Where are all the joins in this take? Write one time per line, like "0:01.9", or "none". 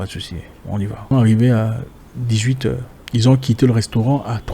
0:01.1
0:02.9